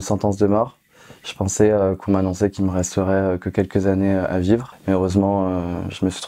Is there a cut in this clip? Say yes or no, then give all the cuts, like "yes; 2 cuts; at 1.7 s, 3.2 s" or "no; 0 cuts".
yes; 1 cut; at 4.7 s